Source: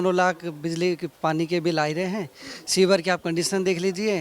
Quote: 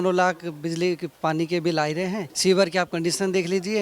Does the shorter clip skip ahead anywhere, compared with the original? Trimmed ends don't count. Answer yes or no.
yes